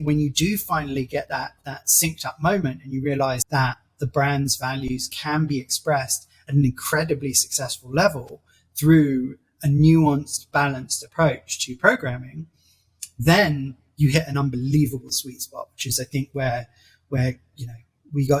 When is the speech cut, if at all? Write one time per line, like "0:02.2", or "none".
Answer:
0:03.4